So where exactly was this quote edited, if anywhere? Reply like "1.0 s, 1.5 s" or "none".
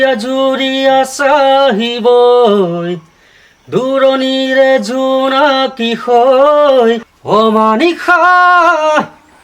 7.1 s